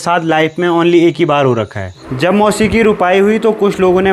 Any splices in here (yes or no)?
yes